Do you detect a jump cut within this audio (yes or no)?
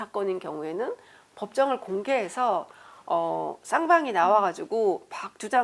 no